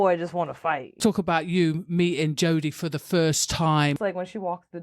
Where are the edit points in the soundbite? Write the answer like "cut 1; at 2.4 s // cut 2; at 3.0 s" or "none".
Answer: cut 1; at 1.0 s // cut 2; at 4.0 s